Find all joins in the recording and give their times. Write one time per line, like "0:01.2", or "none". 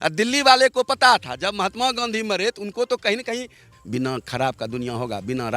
0:03.6